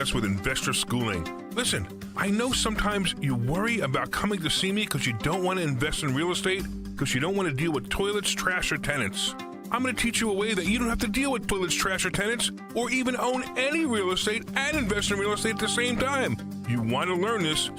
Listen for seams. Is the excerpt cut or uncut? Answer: uncut